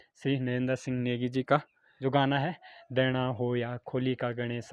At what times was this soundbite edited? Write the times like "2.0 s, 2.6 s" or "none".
none